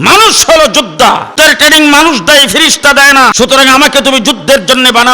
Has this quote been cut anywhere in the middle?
yes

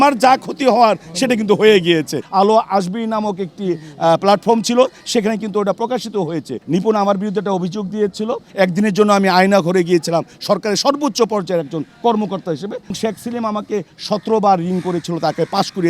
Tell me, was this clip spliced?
yes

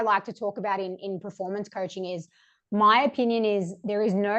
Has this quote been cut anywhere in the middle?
no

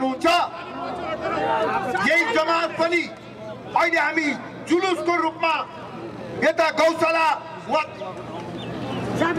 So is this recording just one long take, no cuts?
yes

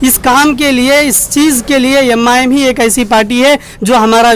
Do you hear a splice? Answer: no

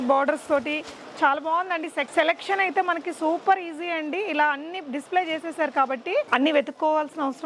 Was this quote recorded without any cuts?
no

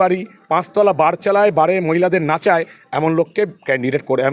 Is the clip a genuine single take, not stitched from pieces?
yes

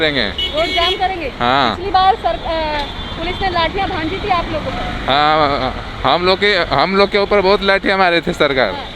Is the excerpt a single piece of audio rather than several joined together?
yes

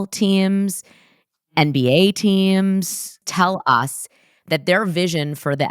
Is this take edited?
yes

